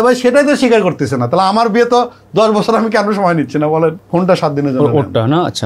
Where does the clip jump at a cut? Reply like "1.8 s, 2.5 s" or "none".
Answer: 4.0 s